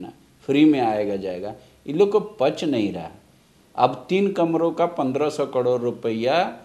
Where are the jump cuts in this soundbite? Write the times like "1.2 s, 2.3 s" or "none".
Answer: none